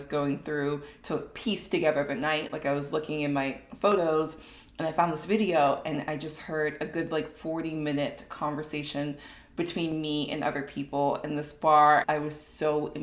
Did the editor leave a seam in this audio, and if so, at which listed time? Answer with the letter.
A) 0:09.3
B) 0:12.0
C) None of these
B